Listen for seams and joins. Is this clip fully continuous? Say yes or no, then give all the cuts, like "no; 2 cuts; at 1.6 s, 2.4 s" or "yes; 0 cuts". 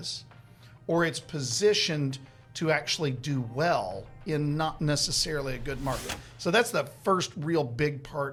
yes; 0 cuts